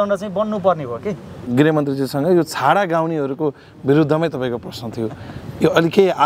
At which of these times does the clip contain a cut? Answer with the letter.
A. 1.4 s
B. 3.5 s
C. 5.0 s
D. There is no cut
A